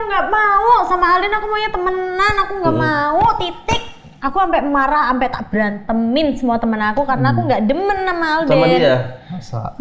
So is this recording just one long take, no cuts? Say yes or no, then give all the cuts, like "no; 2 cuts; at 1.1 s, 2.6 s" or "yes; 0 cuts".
yes; 0 cuts